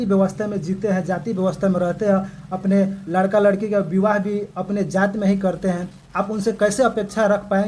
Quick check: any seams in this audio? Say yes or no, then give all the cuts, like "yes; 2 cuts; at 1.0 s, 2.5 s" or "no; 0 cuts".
no; 0 cuts